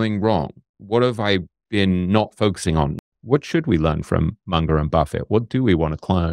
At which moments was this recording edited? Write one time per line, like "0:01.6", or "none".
0:03.1